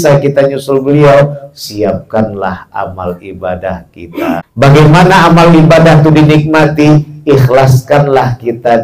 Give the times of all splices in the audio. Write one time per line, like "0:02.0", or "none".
0:04.5